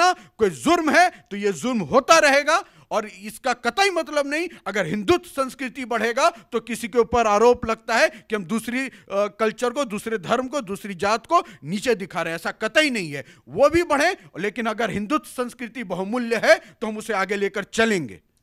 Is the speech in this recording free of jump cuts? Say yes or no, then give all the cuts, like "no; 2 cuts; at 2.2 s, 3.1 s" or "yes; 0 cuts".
yes; 0 cuts